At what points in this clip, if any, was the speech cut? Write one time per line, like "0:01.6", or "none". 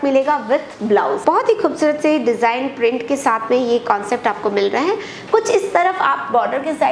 0:01.2